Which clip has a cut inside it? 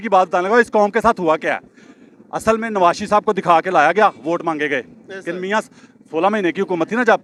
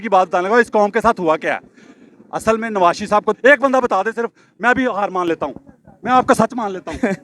second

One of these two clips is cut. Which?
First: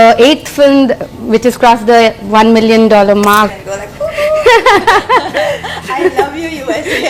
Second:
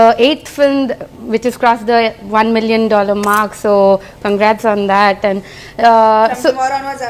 first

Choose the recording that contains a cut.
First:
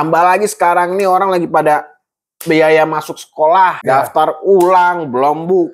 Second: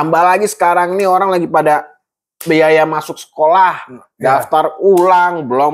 first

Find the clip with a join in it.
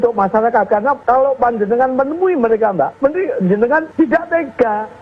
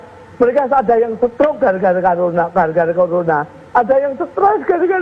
first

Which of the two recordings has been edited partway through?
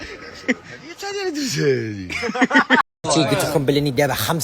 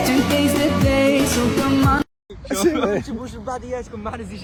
first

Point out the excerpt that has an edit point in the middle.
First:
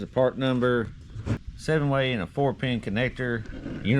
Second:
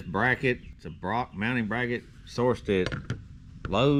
first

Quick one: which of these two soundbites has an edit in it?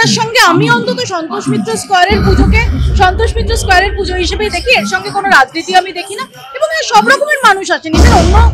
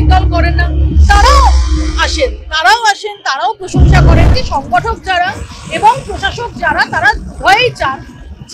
second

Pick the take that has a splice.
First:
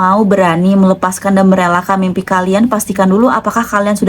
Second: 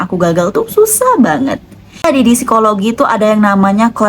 second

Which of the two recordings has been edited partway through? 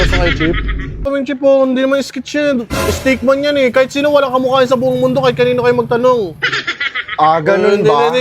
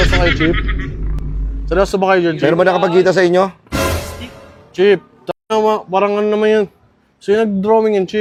first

